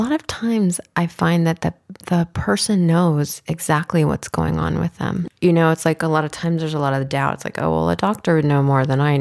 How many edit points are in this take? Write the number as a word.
one